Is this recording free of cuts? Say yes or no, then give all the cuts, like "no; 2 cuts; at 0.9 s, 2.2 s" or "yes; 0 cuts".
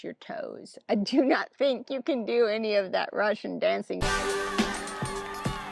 no; 1 cut; at 4.0 s